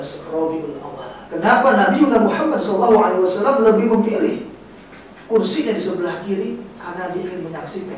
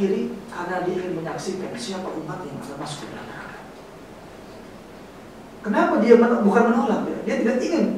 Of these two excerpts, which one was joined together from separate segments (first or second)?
first